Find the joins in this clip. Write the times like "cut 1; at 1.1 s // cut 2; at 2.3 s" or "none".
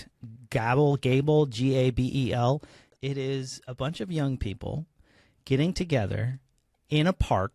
cut 1; at 2.8 s